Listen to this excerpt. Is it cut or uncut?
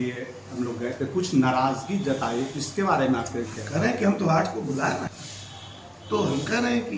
cut